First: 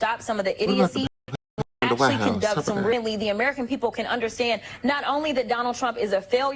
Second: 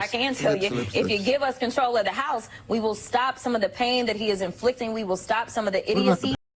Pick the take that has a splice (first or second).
first